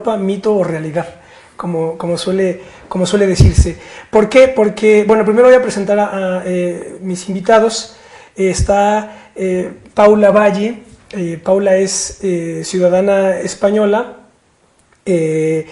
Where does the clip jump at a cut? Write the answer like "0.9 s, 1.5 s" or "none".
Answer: 9.9 s